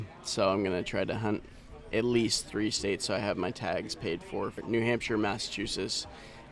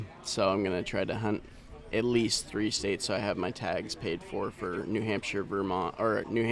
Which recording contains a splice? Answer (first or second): first